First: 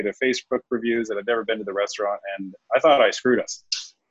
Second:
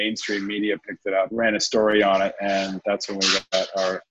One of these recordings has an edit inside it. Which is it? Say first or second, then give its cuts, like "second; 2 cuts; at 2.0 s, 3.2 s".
second; 1 cut; at 1.3 s